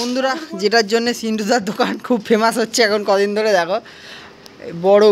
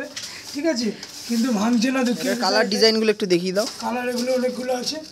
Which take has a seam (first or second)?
second